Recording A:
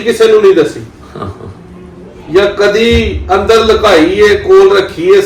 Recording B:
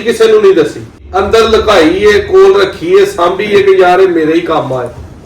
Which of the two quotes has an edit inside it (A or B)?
B